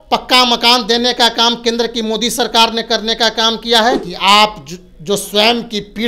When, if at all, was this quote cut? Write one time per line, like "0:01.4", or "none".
0:04.1